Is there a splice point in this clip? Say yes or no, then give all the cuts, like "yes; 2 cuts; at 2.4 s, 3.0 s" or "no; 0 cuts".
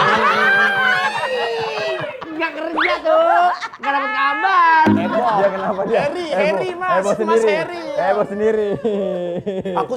no; 0 cuts